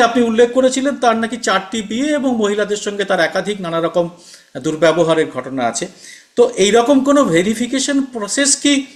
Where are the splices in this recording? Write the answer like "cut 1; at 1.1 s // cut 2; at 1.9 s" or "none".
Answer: none